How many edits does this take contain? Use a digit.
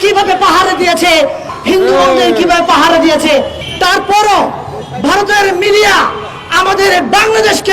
2